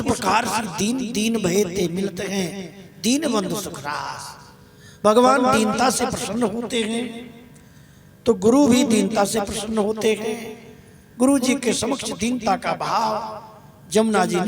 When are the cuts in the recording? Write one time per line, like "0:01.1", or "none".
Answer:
none